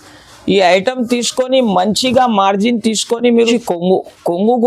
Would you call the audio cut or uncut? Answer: cut